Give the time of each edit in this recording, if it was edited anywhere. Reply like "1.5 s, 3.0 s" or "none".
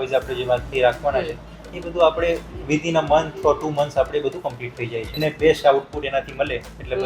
5.1 s